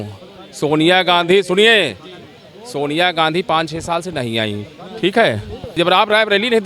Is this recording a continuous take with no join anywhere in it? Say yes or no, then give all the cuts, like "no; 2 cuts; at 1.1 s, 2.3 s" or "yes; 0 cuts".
no; 1 cut; at 5.7 s